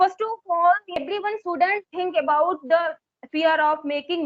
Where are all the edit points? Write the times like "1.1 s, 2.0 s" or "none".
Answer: 1.0 s